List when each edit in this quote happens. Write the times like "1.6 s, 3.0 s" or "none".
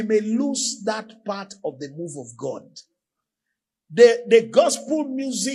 none

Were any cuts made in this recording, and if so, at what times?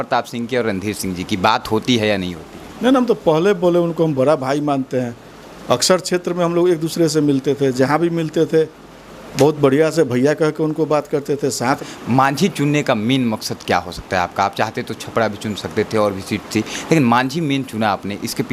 11.8 s

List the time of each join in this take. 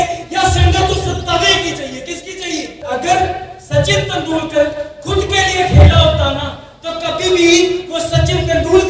2.8 s

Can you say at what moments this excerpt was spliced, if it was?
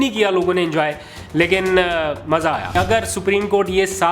2.7 s

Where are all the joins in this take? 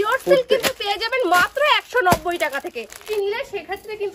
3.1 s

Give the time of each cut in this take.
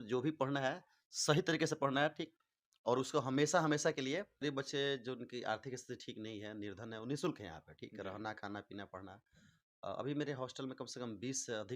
4.4 s

